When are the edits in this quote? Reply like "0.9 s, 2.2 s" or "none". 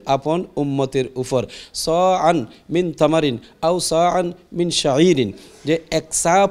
none